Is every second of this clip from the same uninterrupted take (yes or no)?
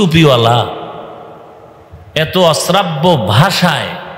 yes